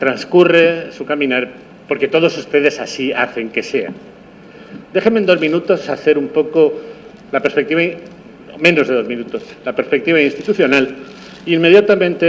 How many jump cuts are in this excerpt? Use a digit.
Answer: 0